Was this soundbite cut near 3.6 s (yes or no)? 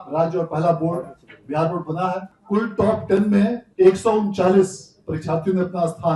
yes